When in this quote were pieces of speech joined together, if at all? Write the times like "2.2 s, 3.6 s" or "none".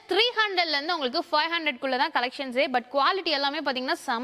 none